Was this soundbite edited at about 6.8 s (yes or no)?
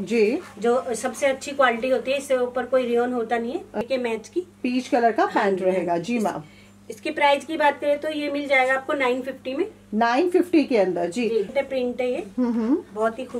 no